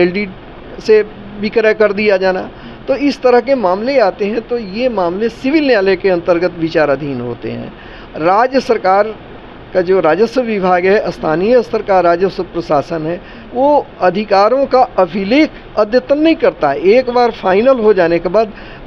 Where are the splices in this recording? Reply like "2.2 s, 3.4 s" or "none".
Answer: none